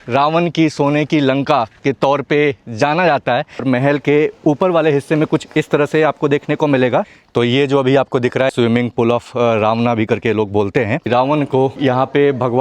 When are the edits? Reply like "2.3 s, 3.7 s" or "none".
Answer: 3.6 s, 7.2 s, 8.5 s, 11.1 s